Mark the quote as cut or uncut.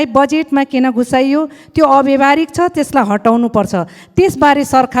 uncut